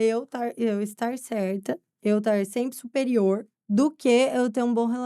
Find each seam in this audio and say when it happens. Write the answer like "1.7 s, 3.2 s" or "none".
1.9 s, 3.5 s